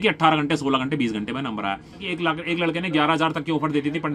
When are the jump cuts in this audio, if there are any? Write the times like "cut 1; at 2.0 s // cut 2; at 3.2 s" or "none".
cut 1; at 2.1 s